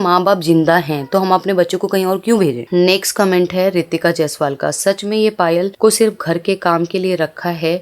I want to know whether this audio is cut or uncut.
uncut